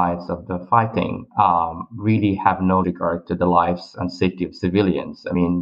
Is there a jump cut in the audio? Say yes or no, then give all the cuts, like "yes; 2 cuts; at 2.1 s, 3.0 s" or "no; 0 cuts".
no; 0 cuts